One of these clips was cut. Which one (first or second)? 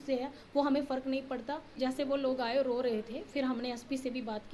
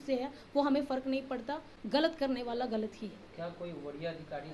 first